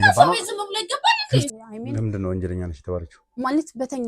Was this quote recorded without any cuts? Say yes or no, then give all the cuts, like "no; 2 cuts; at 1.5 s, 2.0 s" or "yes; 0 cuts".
no; 1 cut; at 1.5 s